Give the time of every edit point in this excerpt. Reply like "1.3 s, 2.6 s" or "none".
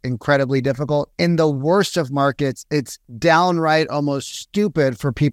1.1 s, 3.0 s